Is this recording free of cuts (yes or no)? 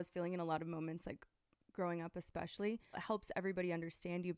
no